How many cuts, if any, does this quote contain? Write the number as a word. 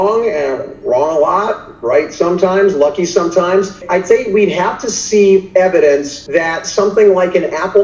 two